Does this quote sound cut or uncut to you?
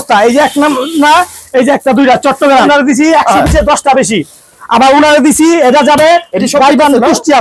cut